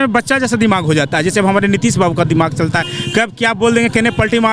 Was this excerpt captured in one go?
yes; 0 cuts

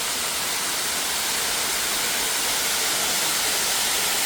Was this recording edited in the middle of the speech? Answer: no; 0 cuts

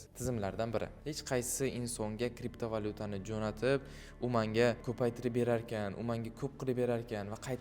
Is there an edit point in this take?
yes; 1 cut; at 1.0 s

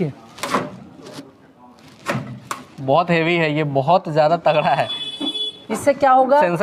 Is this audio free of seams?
yes; 0 cuts

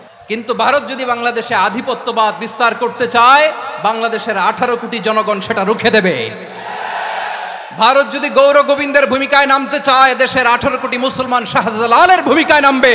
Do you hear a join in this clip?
no; 0 cuts

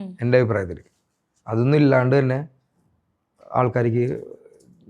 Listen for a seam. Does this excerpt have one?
no; 0 cuts

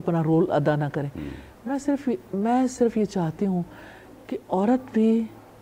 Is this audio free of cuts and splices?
yes; 0 cuts

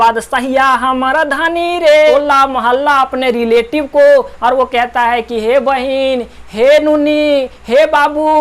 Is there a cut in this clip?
yes; 1 cut; at 2.0 s

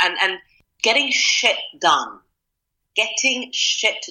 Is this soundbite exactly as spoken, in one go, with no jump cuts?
yes; 0 cuts

